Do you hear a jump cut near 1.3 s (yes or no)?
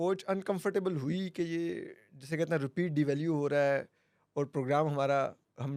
no